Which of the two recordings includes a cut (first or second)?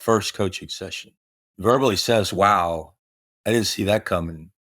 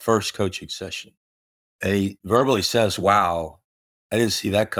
first